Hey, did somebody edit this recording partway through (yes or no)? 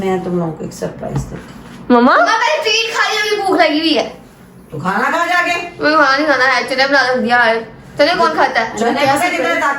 no